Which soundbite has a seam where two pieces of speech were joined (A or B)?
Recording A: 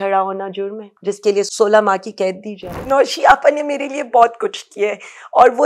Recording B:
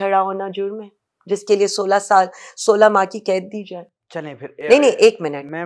A